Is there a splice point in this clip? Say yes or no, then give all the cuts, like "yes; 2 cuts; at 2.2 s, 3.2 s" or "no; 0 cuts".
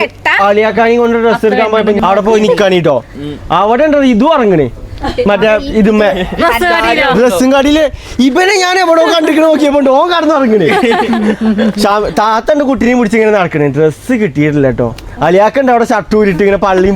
yes; 1 cut; at 2.0 s